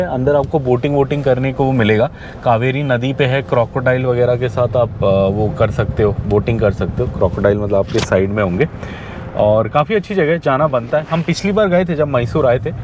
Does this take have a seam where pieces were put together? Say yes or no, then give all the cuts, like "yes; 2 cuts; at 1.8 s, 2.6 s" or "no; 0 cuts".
no; 0 cuts